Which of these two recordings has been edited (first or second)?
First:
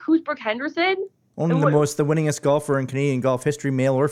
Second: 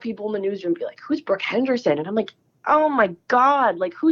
first